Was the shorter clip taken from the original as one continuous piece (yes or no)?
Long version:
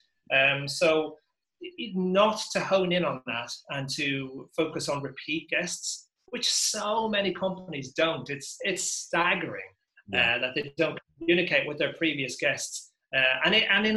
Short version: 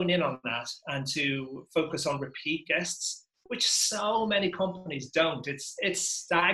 yes